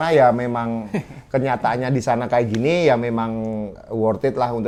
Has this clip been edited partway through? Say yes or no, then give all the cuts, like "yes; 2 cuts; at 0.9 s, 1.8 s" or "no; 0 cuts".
no; 0 cuts